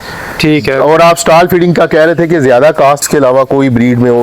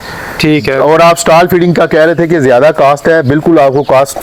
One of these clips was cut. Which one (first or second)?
first